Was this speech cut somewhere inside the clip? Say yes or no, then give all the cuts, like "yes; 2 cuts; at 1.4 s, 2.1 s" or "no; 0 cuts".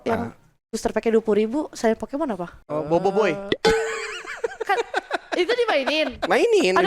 yes; 1 cut; at 2.5 s